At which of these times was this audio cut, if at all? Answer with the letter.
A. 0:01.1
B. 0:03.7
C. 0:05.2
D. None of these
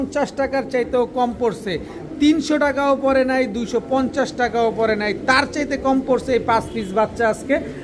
D